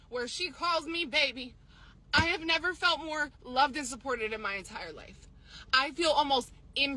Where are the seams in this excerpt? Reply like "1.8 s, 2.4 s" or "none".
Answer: none